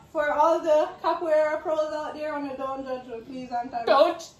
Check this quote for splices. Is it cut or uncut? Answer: uncut